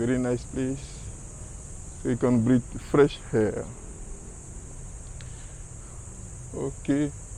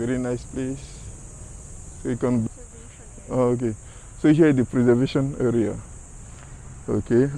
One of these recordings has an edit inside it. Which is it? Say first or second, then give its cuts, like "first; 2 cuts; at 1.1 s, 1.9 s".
second; 1 cut; at 2.5 s